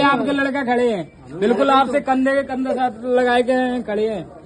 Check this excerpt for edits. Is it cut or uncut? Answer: uncut